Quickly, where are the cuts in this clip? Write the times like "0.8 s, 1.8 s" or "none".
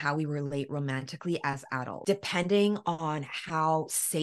1.9 s